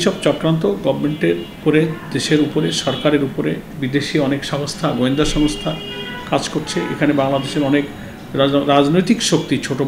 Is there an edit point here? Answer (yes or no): yes